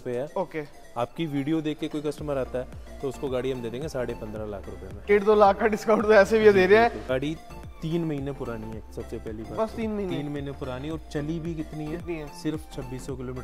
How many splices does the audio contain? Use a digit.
2